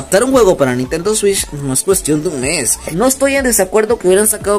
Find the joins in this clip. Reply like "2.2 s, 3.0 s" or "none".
2.8 s